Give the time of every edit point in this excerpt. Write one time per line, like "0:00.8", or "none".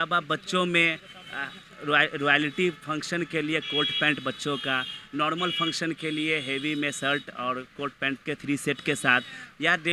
none